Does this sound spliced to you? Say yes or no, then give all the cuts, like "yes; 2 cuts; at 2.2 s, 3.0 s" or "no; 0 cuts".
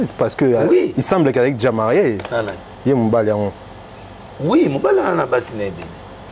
no; 0 cuts